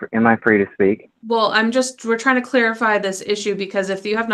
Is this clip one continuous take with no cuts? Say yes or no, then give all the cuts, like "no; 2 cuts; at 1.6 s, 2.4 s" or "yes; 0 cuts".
no; 1 cut; at 1.1 s